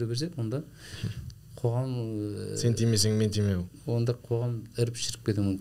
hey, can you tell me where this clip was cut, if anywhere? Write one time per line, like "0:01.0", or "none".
none